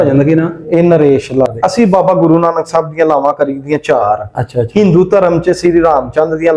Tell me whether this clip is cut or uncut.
cut